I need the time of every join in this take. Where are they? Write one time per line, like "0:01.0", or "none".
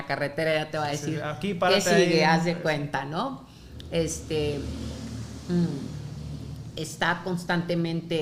none